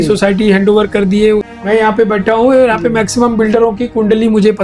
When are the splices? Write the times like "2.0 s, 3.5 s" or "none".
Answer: 1.5 s